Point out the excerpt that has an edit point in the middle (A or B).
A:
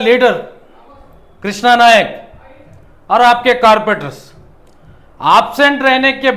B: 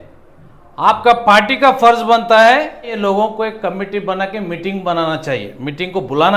B